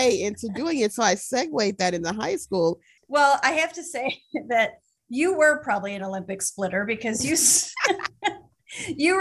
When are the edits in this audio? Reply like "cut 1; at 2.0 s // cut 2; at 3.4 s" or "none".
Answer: cut 1; at 2.9 s